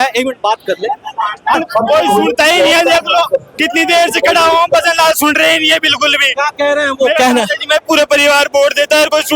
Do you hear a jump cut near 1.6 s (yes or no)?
yes